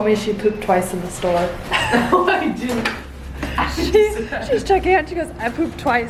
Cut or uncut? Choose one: uncut